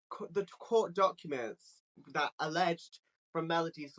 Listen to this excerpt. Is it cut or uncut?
uncut